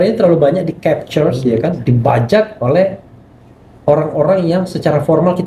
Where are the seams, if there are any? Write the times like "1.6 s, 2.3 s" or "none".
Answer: none